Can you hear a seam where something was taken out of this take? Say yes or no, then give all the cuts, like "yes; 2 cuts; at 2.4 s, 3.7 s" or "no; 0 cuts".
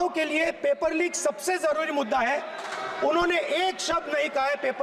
no; 0 cuts